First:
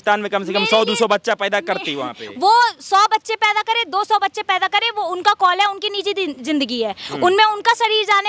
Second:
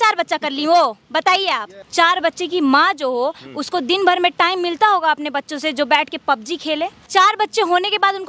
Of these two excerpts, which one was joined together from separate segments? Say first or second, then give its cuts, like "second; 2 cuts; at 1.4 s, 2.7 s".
second; 2 cuts; at 1.7 s, 7.0 s